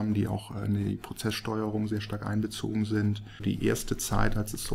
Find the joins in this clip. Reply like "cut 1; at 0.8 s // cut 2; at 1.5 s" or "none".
cut 1; at 3.4 s